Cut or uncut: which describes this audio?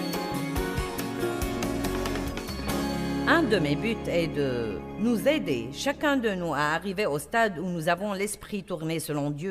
cut